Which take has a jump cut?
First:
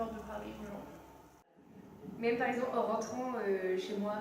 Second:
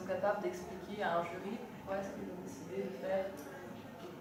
first; 1 cut; at 1.6 s

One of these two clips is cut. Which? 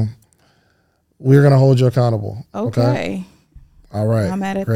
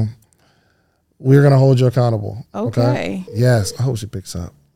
second; 1 cut; at 3.3 s

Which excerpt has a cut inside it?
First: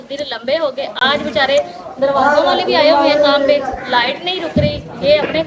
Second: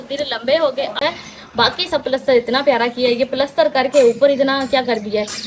second; 1 cut; at 0.9 s

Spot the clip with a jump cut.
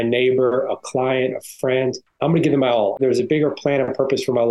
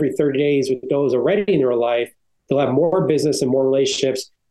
first; 2 cuts; at 2.1 s, 3.0 s

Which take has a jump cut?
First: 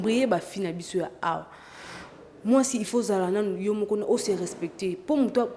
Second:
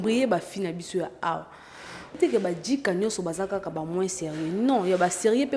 second; 1 cut; at 2.2 s

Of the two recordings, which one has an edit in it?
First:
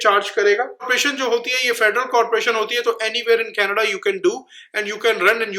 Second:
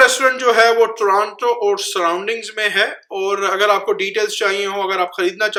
first; 1 cut; at 0.9 s

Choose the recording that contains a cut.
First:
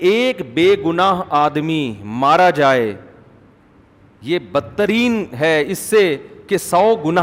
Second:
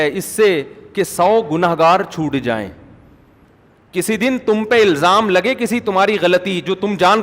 second; 1 cut; at 3.5 s

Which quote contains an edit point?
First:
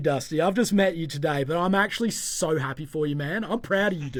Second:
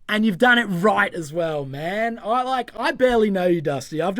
second; 1 cut; at 2.7 s

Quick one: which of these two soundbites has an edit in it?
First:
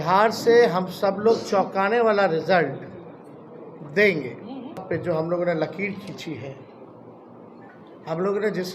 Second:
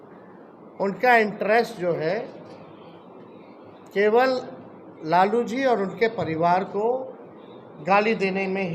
first; 1 cut; at 4.8 s

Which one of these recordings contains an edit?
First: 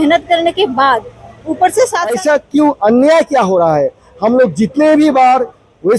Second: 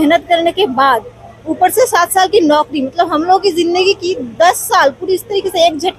first; 1 cut; at 2.1 s

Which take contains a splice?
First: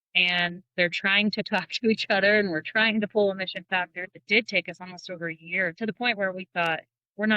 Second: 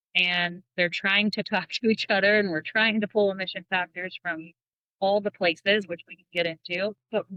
first; 2 cuts; at 4.2 s, 5.8 s

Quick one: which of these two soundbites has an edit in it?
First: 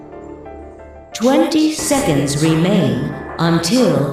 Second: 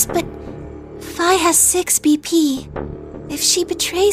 first; 1 cut; at 1.2 s

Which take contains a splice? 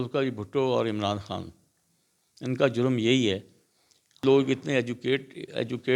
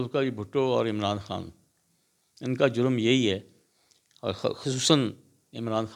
first; 1 cut; at 4.2 s

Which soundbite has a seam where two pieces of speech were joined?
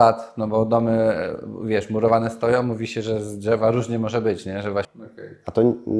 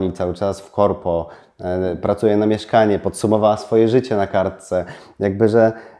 first; 1 cut; at 5.0 s

